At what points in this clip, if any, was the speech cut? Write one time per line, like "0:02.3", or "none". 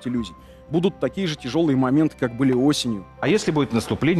0:03.2